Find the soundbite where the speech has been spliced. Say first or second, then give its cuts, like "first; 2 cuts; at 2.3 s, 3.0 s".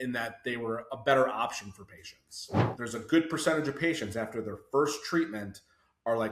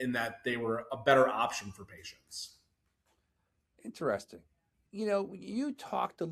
first; 1 cut; at 2.6 s